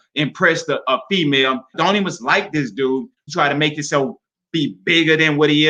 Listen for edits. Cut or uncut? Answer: cut